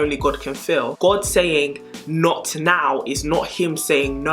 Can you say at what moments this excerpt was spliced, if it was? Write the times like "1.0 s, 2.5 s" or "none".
0.9 s